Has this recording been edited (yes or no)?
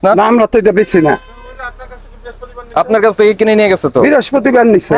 no